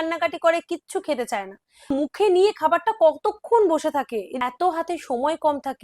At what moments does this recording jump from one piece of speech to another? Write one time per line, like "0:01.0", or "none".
0:01.9
0:04.2